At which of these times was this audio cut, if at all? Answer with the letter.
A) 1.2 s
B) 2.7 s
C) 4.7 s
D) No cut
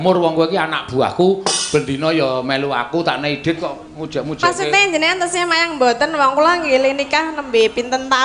D